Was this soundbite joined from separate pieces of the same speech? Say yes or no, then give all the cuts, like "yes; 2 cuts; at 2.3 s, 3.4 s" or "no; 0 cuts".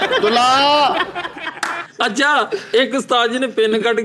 yes; 1 cut; at 1.8 s